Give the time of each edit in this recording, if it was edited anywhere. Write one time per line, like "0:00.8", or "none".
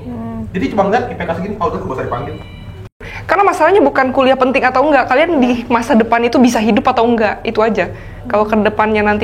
0:03.1